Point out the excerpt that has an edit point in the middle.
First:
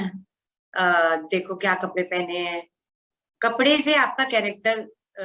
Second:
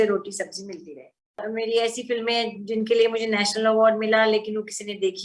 second; 1 cut; at 1.4 s

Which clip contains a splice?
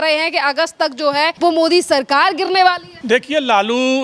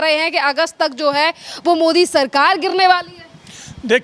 first; 2 cuts; at 1.3 s, 2.9 s

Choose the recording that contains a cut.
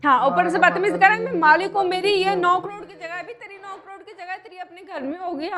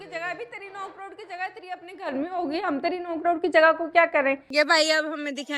second; 1 cut; at 4.4 s

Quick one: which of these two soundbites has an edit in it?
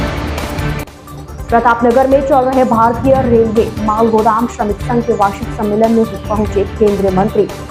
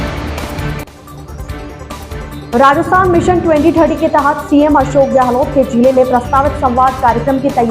second; 1 cut; at 1.3 s

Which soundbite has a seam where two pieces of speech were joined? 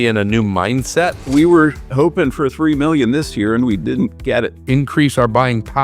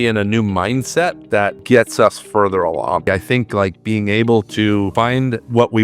first; 2 cuts; at 1.2 s, 4.6 s

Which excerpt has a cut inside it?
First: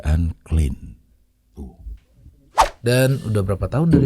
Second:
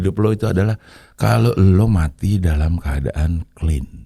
first; 1 cut; at 2.5 s

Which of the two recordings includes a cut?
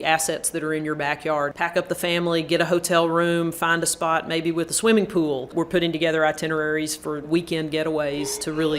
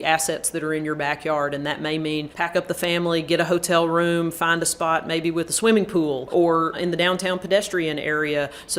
first; 2 cuts; at 1.5 s, 5.5 s

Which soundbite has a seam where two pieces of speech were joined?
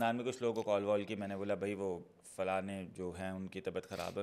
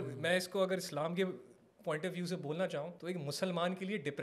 second; 1 cut; at 2.9 s

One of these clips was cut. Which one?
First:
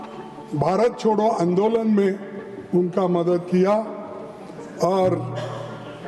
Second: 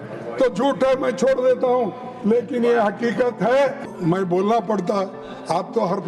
second; 1 cut; at 3.9 s

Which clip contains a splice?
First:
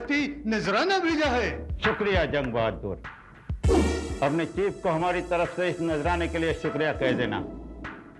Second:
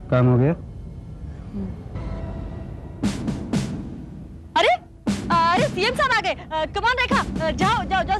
second; 1 cut; at 2.0 s

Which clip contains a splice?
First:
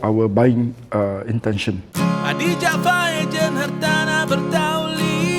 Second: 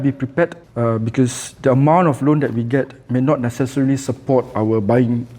first; 1 cut; at 1.9 s

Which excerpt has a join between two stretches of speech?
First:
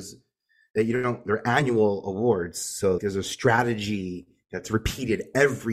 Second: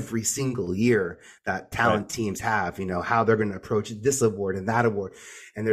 first; 2 cuts; at 1.2 s, 3.0 s

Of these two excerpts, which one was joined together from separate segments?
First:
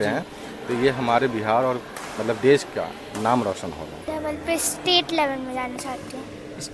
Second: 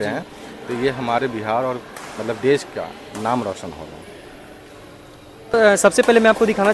first; 1 cut; at 4.1 s

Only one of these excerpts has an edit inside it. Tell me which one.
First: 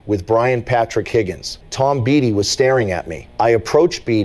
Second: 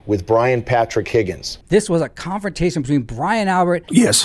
second; 1 cut; at 1.6 s

